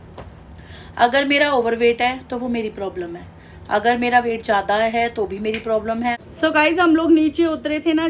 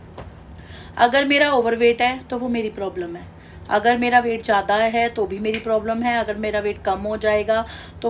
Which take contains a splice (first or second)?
first